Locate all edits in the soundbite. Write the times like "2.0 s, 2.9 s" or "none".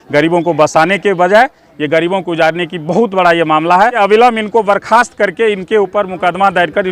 4.0 s